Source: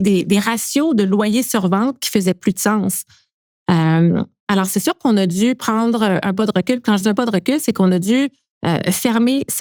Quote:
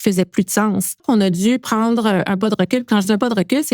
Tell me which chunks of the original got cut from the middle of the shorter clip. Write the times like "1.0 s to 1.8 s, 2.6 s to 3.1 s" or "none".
3.1 s to 5.0 s